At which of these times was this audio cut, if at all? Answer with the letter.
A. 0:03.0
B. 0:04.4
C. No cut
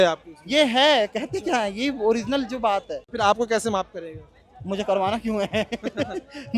A